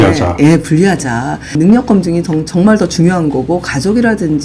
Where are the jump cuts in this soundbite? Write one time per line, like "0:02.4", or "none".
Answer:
0:01.6